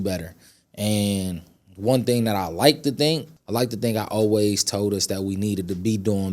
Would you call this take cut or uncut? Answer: cut